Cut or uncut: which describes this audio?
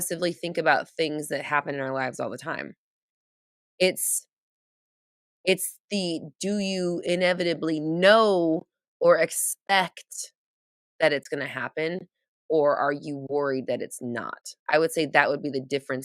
cut